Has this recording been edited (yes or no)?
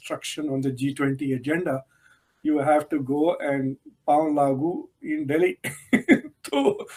no